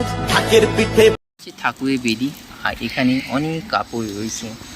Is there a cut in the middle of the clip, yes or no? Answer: yes